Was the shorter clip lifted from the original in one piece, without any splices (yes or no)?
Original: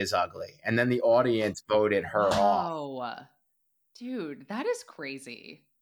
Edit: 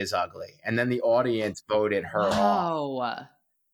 yes